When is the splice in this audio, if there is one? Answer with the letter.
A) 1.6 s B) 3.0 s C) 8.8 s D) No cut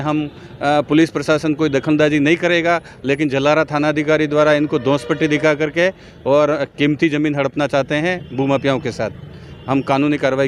D